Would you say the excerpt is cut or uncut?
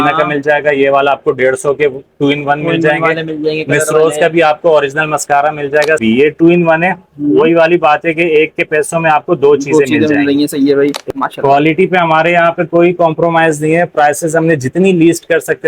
cut